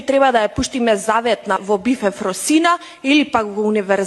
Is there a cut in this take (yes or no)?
yes